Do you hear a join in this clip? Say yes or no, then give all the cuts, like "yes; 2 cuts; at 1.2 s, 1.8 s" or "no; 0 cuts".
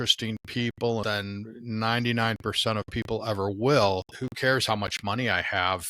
yes; 2 cuts; at 1.0 s, 4.1 s